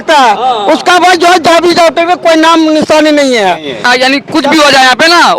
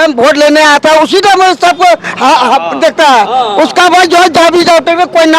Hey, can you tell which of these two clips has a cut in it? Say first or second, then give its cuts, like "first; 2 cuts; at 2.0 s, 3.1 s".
first; 1 cut; at 3.8 s